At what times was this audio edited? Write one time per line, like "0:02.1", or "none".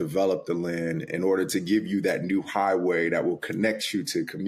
none